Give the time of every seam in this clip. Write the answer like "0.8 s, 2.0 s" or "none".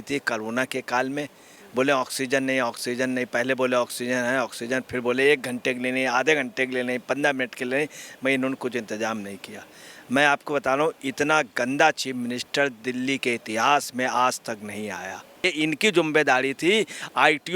15.5 s

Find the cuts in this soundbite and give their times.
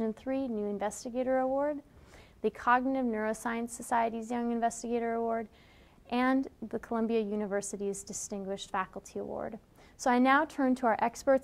none

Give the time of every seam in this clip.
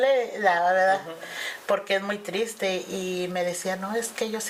none

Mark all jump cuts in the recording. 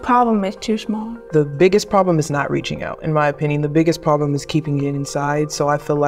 1.3 s

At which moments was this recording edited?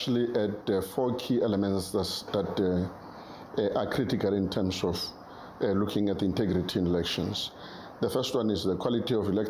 none

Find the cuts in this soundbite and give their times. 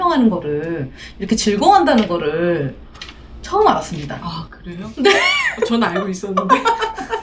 none

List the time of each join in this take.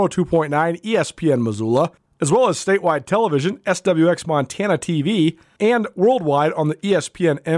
2.1 s, 5.5 s

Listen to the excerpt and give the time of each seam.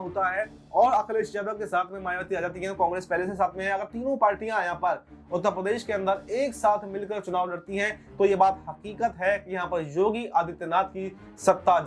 none

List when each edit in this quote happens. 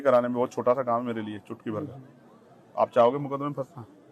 none

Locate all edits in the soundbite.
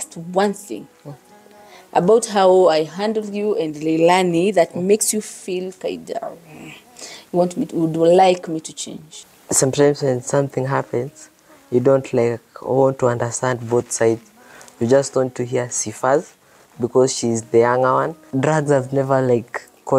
18.2 s

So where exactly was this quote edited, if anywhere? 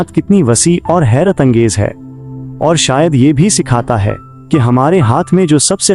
1.3 s

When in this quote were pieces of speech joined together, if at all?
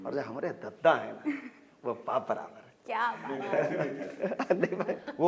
none

